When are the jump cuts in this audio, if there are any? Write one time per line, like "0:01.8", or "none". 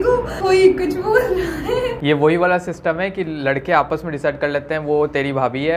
none